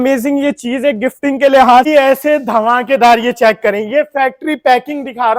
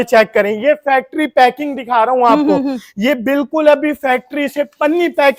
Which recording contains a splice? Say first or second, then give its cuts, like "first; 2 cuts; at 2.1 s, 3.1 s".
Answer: first; 1 cut; at 1.9 s